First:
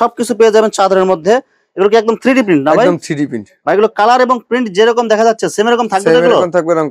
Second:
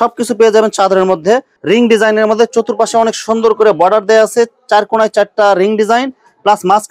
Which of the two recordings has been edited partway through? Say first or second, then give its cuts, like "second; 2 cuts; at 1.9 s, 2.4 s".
second; 1 cut; at 1.5 s